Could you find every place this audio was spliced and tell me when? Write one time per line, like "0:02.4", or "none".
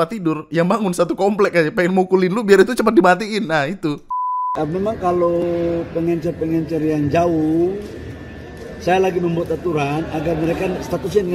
0:04.0